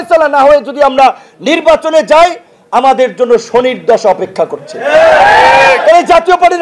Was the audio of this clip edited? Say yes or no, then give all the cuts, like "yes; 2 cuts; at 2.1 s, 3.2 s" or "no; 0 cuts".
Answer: no; 0 cuts